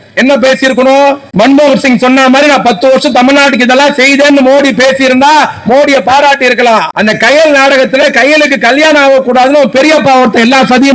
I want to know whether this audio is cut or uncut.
cut